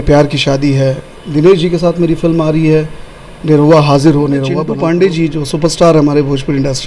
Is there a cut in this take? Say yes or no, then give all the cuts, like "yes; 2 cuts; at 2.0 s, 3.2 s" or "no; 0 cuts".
yes; 1 cut; at 4.6 s